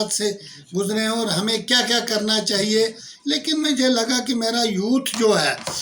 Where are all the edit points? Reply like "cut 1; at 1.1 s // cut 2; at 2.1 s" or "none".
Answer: cut 1; at 3.1 s